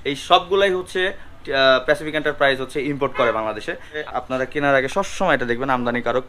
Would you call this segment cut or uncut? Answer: cut